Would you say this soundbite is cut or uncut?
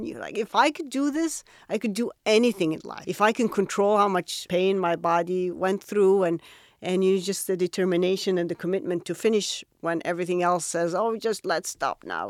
cut